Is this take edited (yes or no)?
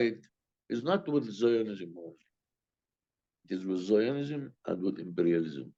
no